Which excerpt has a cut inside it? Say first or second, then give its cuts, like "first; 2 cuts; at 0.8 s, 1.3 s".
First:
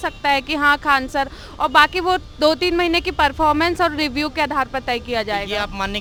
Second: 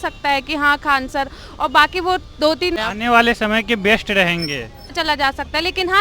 second; 2 cuts; at 2.8 s, 4.9 s